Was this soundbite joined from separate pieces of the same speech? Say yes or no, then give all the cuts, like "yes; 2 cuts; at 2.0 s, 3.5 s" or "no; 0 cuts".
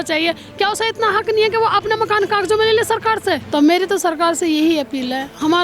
yes; 1 cut; at 3.4 s